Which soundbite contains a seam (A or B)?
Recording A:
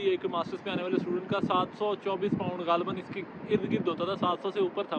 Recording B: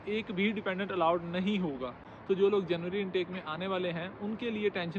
B